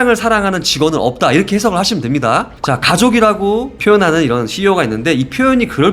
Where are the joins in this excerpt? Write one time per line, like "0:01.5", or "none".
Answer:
0:02.5